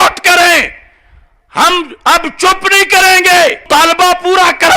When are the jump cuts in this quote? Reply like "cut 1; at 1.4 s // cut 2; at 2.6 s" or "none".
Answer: cut 1; at 3.7 s